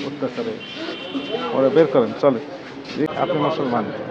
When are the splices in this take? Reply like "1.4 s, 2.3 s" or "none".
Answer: 3.1 s